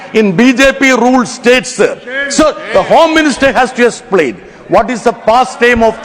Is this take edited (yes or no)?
no